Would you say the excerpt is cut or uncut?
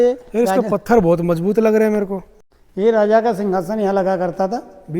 cut